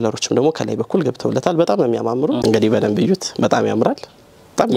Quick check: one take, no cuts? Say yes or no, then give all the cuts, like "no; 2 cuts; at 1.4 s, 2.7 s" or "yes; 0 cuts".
no; 1 cut; at 2.4 s